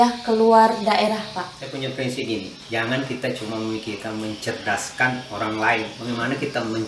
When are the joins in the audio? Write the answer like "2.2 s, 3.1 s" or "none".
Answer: 1.6 s